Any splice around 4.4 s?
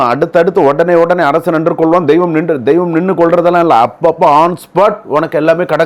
no; 0 cuts

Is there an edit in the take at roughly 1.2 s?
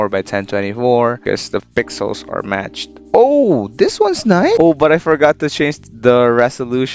yes; 2 cuts; at 1.2 s, 4.6 s

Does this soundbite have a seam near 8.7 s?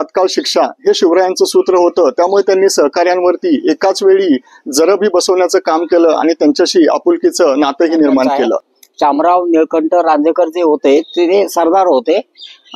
yes; 1 cut; at 8.7 s

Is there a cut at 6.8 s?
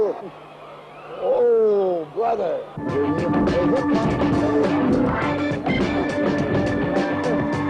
yes; 1 cut; at 6.8 s

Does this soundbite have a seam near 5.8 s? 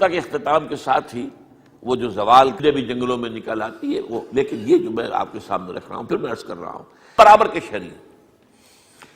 no; 2 cuts; at 2.6 s, 7.1 s

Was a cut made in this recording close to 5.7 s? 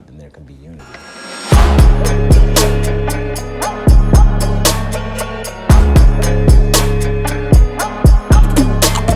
no; 1 cut; at 0.9 s

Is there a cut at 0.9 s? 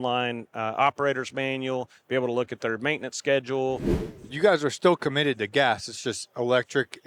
no; 1 cut; at 3.9 s

